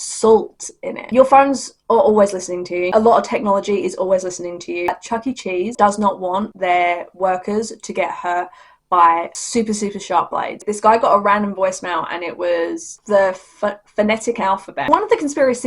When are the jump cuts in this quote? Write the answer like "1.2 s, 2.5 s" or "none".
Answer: 1.0 s, 4.9 s, 10.7 s, 14.9 s

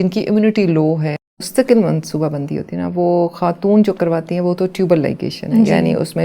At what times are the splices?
1.2 s

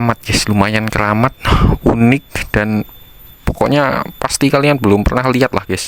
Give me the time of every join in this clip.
none

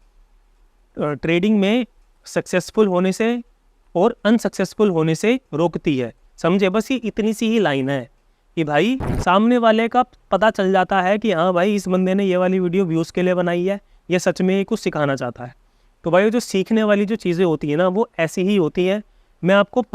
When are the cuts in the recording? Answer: 9.1 s

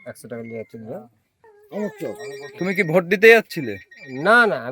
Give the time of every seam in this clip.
1.3 s

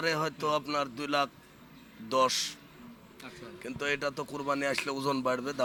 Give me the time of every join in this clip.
none

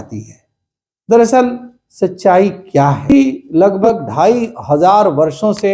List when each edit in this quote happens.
3.1 s

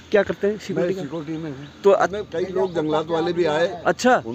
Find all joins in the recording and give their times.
2.1 s

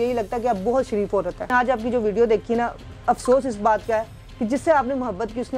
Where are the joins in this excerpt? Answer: 1.5 s

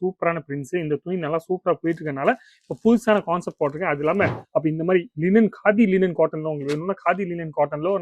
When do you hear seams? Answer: 4.4 s

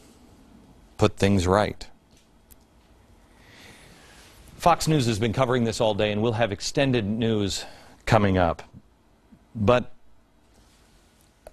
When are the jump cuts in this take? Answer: 8.6 s

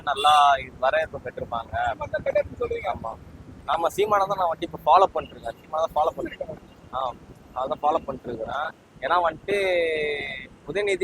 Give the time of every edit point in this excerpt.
3.5 s

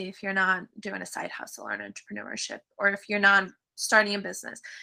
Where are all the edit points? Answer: none

